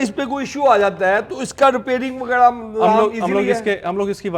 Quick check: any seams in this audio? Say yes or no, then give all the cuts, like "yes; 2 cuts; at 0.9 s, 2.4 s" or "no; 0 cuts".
no; 0 cuts